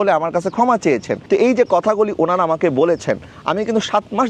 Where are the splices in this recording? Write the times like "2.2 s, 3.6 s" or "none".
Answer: none